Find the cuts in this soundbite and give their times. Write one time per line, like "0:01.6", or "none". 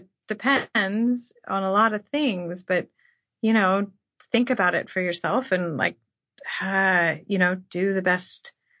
none